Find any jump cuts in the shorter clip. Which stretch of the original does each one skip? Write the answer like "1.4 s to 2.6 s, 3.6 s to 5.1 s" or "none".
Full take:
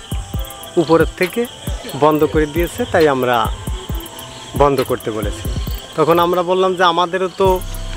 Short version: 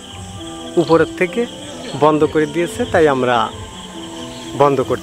none